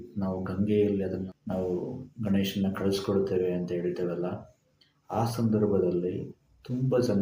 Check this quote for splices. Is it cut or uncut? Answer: cut